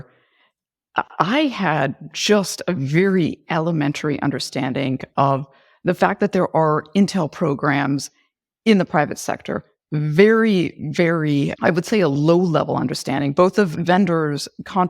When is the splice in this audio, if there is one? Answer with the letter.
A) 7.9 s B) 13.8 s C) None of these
B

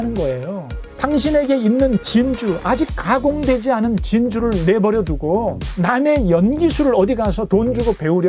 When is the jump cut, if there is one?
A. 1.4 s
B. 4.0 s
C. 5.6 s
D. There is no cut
C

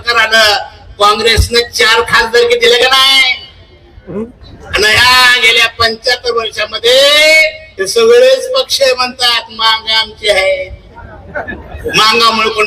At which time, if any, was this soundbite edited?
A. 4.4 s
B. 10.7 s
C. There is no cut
A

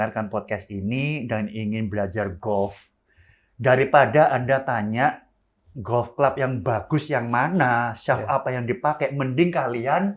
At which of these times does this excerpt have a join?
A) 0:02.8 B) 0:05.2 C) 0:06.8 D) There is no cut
D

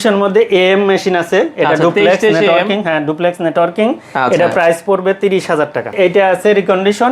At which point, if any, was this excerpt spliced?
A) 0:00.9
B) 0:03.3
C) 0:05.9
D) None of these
C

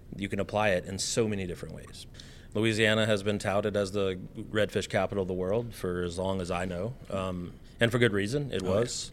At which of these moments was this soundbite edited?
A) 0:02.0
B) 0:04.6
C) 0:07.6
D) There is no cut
A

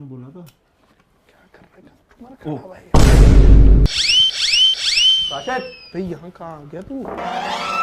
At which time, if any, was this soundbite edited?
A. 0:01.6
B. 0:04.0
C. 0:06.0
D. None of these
B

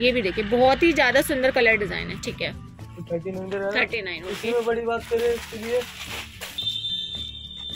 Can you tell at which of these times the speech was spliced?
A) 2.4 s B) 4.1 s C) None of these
C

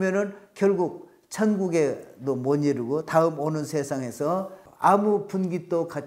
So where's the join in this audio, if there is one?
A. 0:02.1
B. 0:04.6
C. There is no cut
B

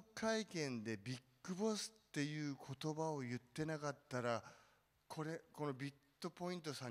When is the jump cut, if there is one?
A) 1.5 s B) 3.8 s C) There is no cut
C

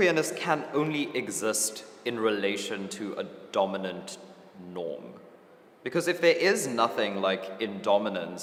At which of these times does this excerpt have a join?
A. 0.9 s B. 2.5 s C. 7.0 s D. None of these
D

